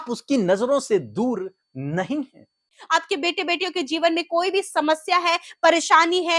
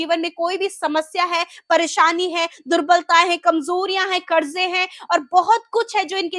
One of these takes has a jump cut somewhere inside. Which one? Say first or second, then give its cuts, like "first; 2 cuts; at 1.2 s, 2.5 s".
first; 1 cut; at 2.8 s